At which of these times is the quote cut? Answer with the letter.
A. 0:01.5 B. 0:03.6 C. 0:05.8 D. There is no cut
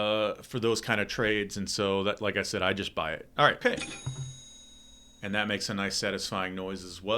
B